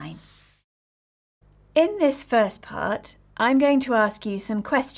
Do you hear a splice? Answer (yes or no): yes